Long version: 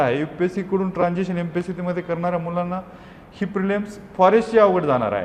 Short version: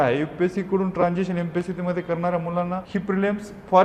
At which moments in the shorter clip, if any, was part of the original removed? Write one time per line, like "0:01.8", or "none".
0:02.8